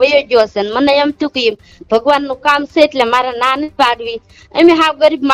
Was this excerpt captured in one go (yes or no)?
yes